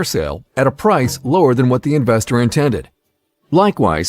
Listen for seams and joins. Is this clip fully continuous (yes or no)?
yes